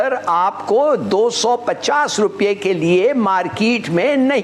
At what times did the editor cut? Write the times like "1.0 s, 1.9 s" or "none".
none

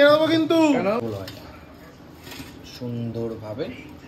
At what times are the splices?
1.1 s

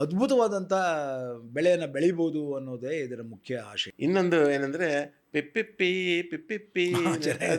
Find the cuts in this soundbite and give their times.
3.8 s

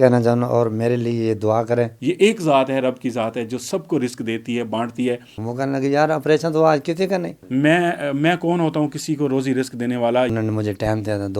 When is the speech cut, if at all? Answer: 1.9 s, 5.3 s, 7.4 s, 10.3 s

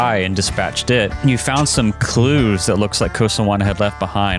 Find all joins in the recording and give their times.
1.2 s

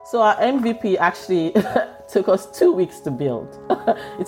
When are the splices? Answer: none

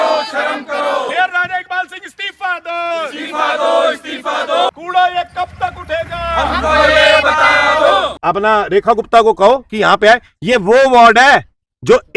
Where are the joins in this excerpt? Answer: 1.1 s, 4.7 s, 8.1 s

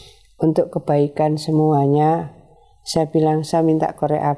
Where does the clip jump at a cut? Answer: none

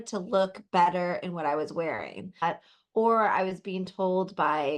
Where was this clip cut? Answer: 2.4 s

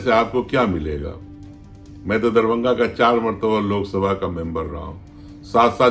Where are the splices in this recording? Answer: none

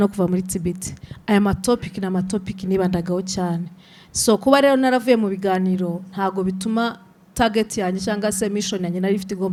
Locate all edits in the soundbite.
none

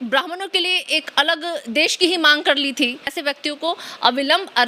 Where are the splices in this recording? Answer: 3.1 s

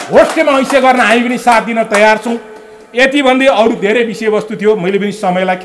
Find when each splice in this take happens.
none

